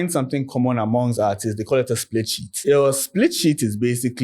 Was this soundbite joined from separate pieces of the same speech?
yes; 1 cut; at 2.4 s

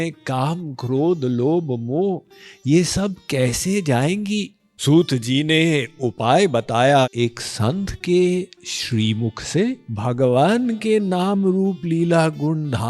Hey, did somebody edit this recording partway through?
yes; 2 cuts; at 7.1 s, 9.9 s

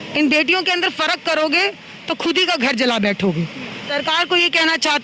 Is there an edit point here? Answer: yes; 1 cut; at 3.8 s

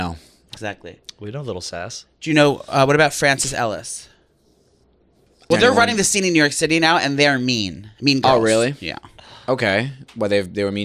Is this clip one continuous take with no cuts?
no; 1 cut; at 5.5 s

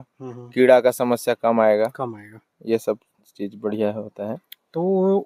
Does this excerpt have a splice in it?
no; 0 cuts

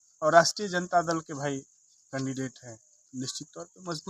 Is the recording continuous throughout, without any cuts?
yes; 0 cuts

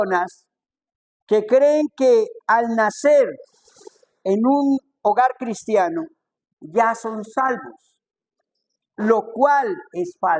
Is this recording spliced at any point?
no; 0 cuts

